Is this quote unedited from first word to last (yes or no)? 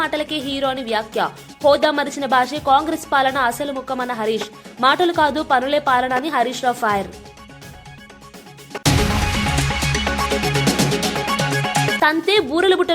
yes